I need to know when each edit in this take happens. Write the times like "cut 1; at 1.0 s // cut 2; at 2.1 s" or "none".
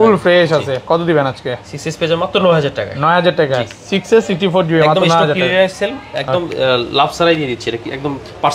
none